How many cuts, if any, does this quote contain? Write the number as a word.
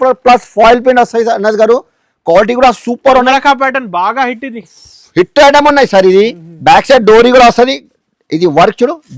zero